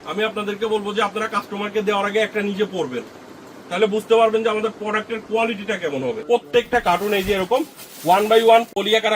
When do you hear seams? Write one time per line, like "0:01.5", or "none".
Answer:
0:06.2